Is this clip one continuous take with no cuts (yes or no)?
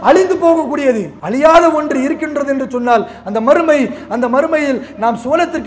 no